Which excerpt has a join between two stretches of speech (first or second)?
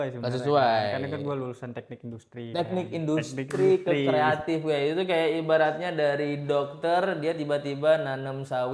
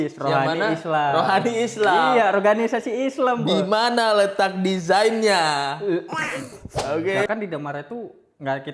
second